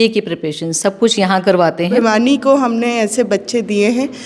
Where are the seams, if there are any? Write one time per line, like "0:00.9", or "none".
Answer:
0:02.0